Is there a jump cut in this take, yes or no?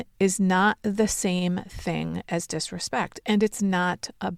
no